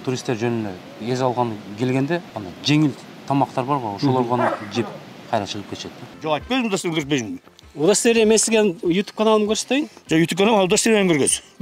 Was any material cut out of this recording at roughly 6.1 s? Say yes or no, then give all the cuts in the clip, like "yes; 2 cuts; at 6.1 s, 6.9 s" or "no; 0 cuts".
yes; 1 cut; at 6.1 s